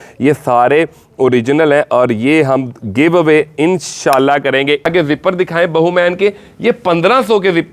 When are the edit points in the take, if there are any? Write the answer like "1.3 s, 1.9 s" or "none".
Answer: 4.9 s